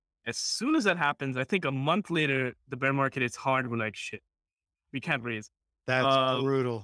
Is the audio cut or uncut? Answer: uncut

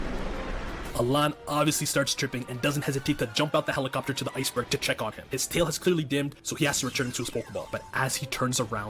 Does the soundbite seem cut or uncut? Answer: uncut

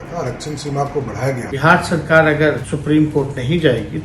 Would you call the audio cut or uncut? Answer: cut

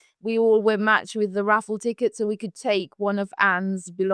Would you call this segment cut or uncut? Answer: uncut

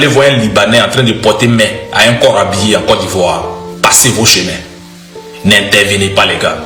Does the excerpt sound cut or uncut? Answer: uncut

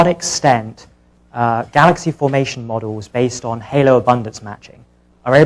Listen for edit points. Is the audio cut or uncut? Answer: uncut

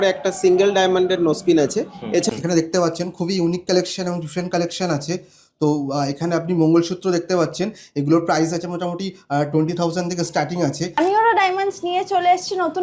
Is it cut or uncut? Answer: cut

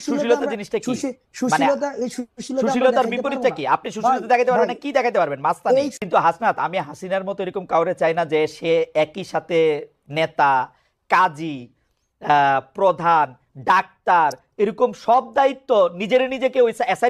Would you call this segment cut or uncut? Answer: cut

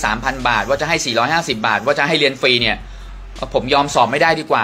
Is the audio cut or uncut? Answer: uncut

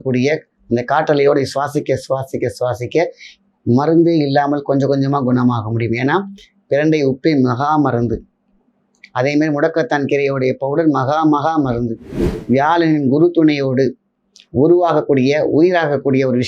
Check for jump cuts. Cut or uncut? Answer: cut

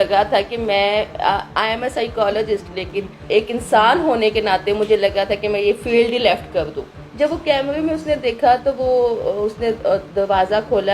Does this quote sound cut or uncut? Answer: cut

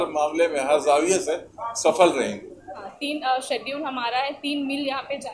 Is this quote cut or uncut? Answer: cut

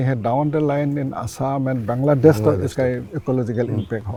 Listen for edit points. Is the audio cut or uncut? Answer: uncut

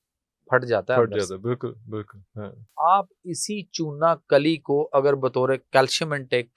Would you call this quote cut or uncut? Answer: cut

